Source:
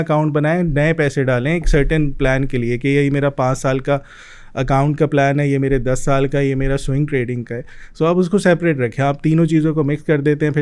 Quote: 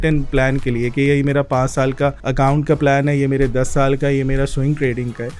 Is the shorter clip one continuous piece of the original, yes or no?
no